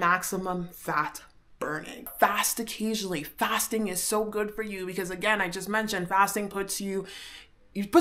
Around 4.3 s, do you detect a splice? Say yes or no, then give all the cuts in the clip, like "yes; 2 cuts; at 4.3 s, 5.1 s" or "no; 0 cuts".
no; 1 cut; at 2.1 s